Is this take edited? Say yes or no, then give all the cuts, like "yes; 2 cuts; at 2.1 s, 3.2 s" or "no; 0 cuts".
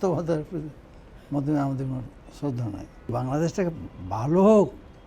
yes; 1 cut; at 3.1 s